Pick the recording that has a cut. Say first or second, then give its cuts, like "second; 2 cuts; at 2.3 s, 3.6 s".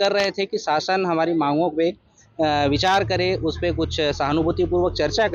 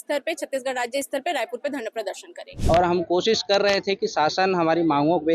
second; 1 cut; at 2.5 s